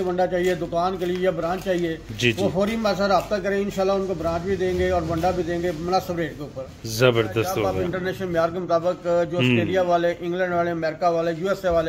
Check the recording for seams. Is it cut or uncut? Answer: cut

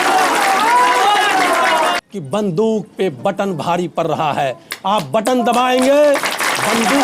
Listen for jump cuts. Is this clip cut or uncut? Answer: cut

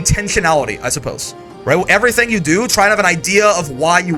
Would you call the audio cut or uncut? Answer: uncut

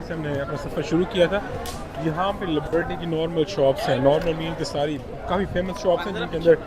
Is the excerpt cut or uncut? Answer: uncut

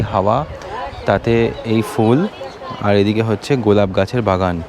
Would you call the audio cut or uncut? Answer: uncut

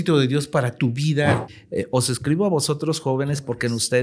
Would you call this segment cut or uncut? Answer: cut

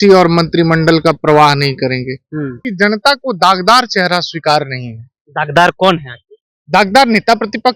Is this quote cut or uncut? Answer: cut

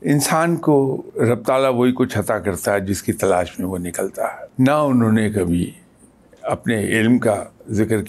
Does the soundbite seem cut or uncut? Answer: cut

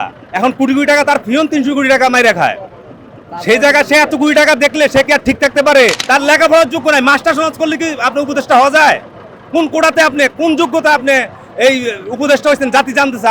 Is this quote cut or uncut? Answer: cut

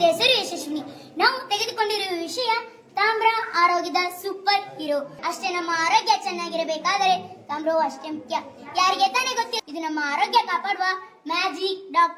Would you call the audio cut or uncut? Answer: cut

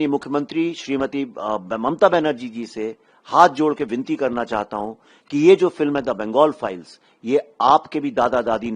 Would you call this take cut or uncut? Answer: uncut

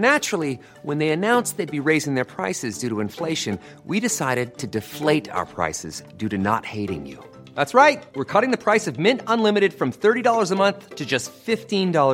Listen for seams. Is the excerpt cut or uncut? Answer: uncut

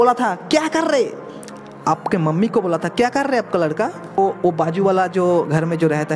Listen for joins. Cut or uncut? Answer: cut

